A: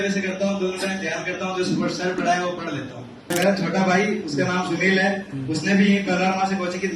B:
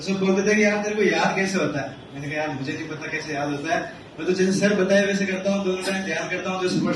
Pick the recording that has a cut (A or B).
A